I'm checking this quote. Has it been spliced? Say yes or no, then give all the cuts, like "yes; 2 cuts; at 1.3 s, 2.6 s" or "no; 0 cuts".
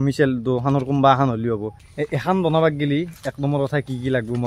yes; 1 cut; at 1.9 s